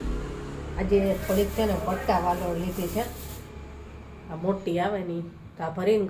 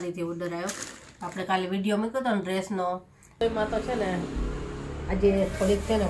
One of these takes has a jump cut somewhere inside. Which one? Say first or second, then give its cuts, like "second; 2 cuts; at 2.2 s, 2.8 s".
second; 1 cut; at 3.4 s